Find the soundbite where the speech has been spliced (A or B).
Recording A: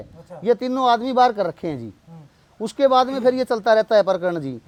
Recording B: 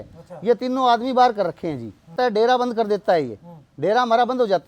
B